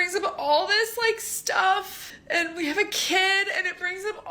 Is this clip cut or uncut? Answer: cut